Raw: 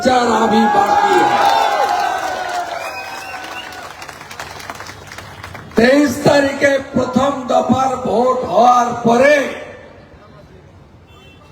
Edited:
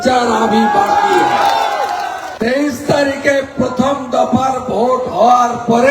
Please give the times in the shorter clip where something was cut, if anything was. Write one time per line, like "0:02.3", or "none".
0:02.2